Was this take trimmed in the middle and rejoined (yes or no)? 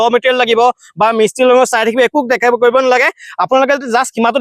no